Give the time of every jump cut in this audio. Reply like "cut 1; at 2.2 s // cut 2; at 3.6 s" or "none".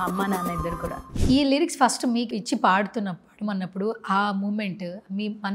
cut 1; at 1.1 s